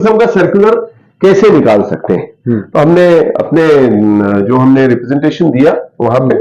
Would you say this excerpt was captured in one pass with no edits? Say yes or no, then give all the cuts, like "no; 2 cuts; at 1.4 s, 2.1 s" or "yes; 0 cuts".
yes; 0 cuts